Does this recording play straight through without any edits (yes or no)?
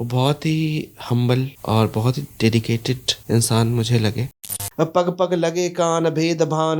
no